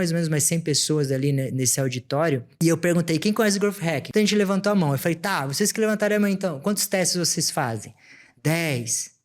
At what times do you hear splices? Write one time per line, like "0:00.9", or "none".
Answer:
0:02.5
0:04.0